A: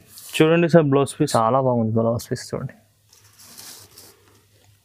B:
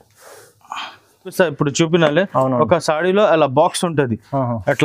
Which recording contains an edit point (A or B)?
B